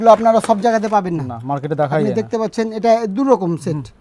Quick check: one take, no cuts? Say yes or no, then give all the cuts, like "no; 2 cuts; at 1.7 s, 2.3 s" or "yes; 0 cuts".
yes; 0 cuts